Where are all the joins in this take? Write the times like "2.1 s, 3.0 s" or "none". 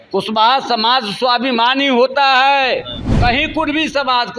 3.0 s